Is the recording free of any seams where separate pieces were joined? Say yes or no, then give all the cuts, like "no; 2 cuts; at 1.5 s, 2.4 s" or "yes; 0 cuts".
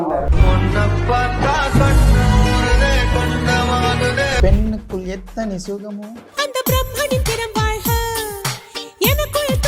no; 1 cut; at 4.4 s